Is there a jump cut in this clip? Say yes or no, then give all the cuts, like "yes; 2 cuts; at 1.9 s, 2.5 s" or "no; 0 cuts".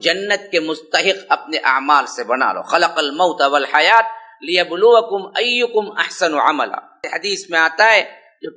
yes; 1 cut; at 7.1 s